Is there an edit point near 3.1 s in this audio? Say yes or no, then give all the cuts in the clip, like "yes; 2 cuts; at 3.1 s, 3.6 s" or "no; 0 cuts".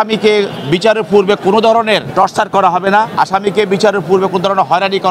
yes; 2 cuts; at 2.1 s, 3.1 s